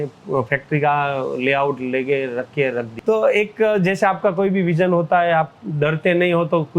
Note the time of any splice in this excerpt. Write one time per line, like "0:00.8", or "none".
0:02.9